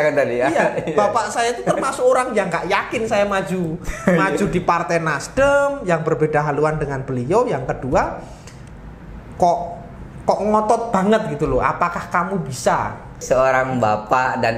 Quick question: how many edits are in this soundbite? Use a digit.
1